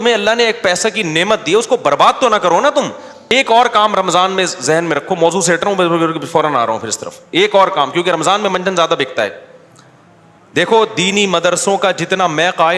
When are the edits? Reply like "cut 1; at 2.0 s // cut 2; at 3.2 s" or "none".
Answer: cut 1; at 3.3 s